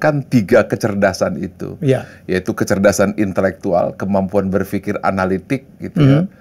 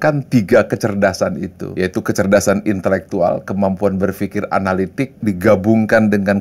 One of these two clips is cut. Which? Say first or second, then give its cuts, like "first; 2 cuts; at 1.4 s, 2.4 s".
second; 2 cuts; at 1.6 s, 5.2 s